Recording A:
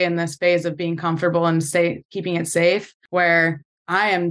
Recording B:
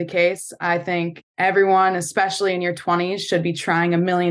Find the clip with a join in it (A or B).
A